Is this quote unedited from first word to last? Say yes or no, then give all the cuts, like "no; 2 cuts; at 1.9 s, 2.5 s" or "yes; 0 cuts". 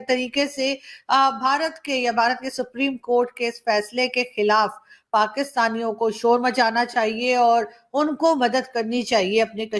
yes; 0 cuts